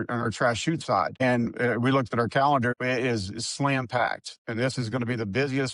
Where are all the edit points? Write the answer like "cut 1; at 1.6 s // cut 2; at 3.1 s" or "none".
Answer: cut 1; at 1.1 s // cut 2; at 2.7 s